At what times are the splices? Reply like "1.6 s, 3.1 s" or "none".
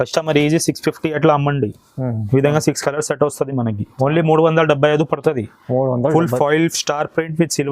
none

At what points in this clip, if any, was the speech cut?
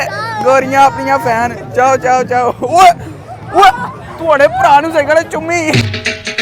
none

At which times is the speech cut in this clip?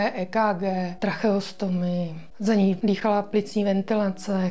0.9 s, 2.2 s, 2.8 s

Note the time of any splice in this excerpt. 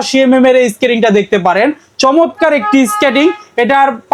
none

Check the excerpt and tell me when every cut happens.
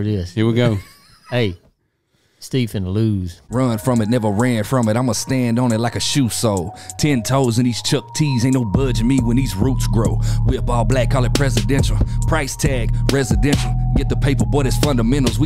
3.5 s

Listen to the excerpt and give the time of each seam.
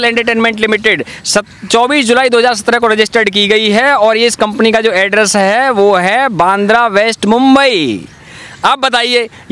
none

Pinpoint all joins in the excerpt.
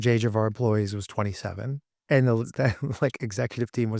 1.9 s

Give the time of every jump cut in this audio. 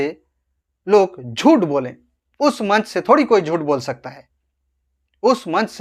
none

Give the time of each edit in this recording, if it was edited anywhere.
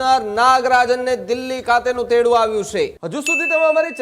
3.1 s

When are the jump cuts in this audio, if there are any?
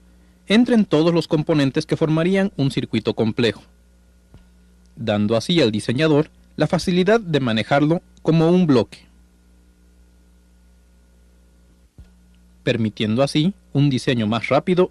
none

